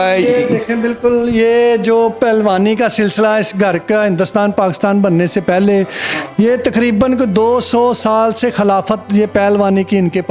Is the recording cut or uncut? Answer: uncut